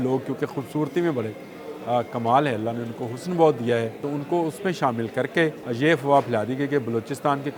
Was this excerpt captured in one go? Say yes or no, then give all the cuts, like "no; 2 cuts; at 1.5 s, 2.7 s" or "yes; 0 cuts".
no; 2 cuts; at 4.0 s, 5.6 s